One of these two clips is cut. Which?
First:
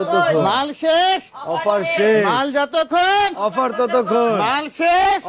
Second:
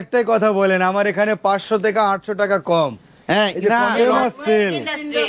second; 1 cut; at 3.9 s

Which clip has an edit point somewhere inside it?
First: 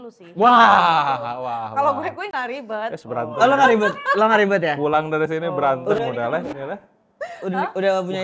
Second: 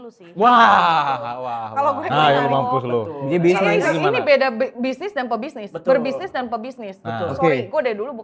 second; 1 cut; at 2.1 s

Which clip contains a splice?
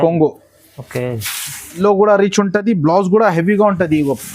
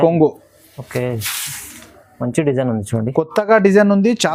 first; 1 cut; at 1.8 s

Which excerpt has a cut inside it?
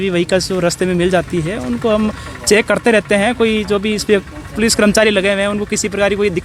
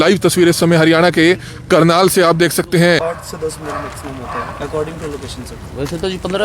second; 1 cut; at 3.0 s

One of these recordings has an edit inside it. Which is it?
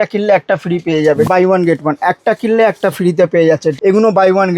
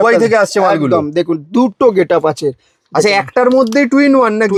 first; 2 cuts; at 1.3 s, 3.7 s

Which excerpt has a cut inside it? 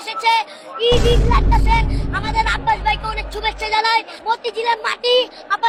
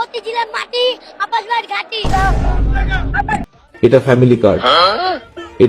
second; 1 cut; at 3.7 s

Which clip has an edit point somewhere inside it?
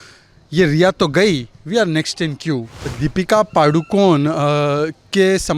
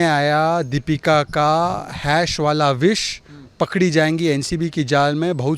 first; 1 cut; at 2.9 s

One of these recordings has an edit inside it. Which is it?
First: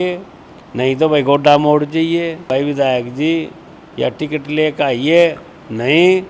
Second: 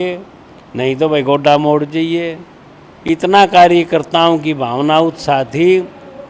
first; 1 cut; at 2.5 s

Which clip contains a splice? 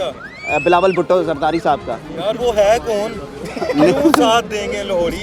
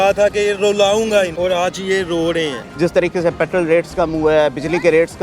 second; 2 cuts; at 1.3 s, 2.6 s

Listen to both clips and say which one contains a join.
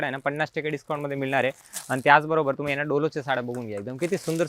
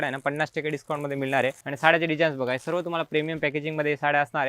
second; 1 cut; at 1.6 s

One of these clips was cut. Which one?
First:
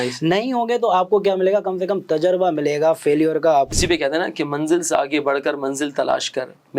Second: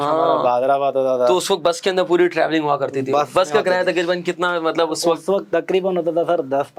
first; 1 cut; at 3.7 s

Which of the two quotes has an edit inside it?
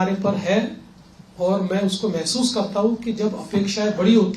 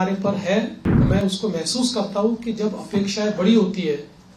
second; 1 cut; at 1.1 s

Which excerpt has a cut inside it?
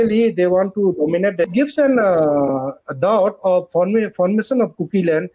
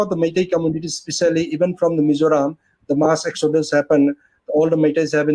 first; 1 cut; at 1.5 s

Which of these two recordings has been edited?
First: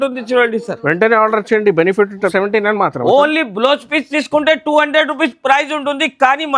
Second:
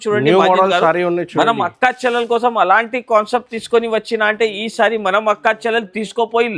first; 1 cut; at 2.3 s

